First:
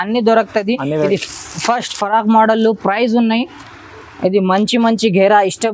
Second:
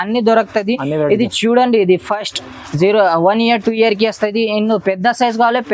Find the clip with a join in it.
first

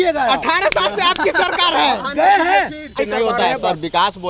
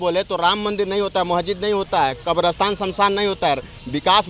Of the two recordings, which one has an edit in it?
first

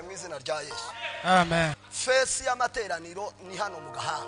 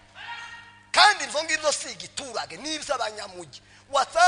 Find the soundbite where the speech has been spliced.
first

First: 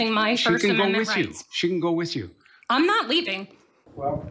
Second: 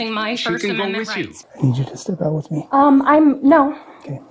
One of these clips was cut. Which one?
second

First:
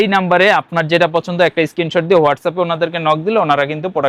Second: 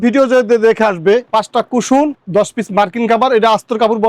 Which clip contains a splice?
second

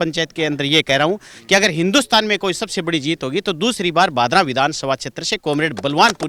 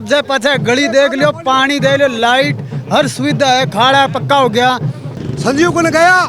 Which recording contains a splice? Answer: second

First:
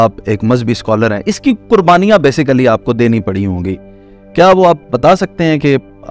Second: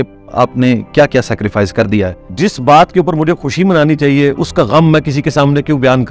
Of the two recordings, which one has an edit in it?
second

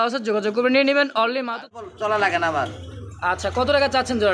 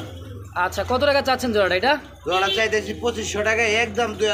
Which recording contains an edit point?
first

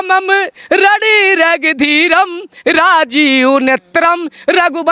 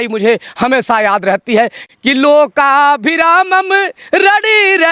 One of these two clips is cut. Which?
second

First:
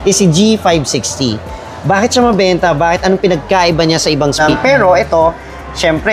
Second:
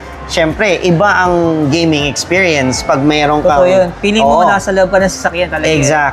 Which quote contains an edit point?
first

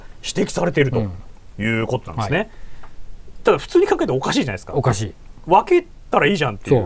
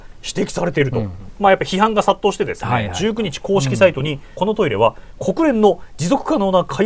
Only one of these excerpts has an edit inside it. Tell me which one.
second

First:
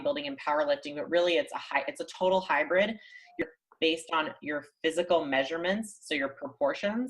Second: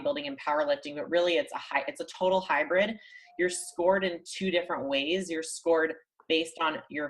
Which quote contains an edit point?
first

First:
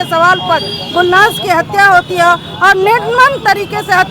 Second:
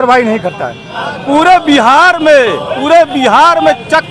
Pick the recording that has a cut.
second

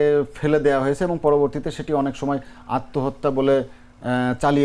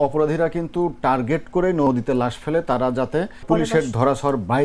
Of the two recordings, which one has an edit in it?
second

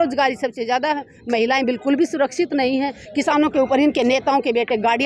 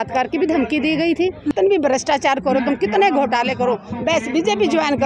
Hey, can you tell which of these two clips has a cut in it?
second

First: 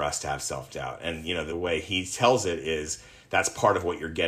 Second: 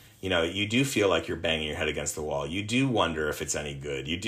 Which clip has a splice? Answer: first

